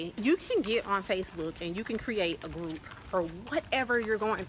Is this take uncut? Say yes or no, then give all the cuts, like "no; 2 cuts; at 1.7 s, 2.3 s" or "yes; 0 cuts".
yes; 0 cuts